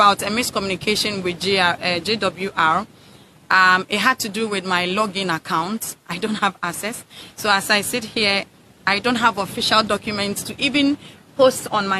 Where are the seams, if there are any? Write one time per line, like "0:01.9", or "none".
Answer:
none